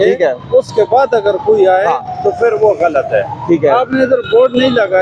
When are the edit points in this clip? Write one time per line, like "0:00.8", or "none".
none